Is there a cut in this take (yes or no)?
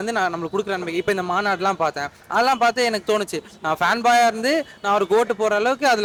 no